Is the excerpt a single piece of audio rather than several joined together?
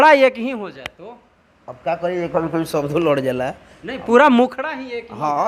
yes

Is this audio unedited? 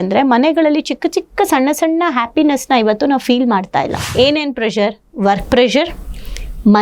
no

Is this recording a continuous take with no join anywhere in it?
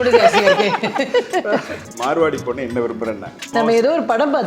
no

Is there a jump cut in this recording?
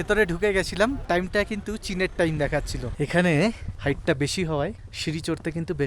yes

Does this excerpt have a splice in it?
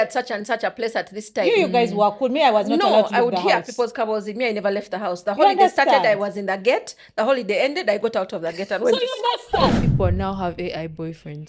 yes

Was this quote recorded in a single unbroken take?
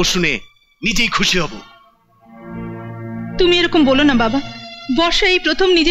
yes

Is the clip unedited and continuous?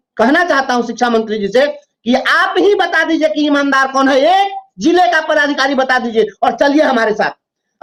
yes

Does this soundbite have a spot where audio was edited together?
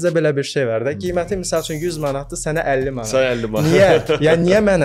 no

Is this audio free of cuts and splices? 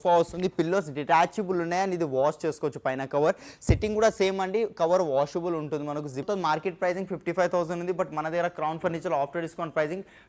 no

